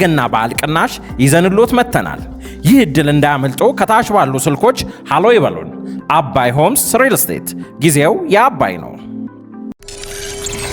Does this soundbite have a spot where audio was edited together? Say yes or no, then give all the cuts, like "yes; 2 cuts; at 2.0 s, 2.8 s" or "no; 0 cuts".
yes; 1 cut; at 9.8 s